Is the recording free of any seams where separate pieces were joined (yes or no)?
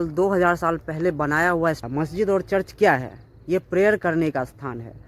no